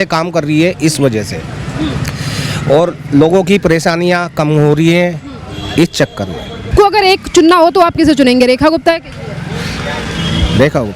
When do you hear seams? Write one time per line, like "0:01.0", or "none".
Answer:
0:06.6